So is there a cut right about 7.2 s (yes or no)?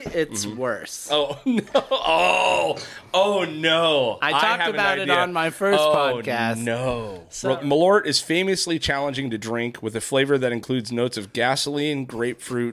yes